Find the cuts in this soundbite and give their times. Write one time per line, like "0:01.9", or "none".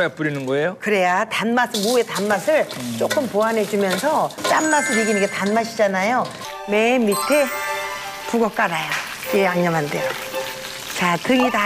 0:04.4
0:06.4